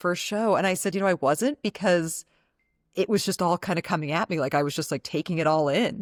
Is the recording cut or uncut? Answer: uncut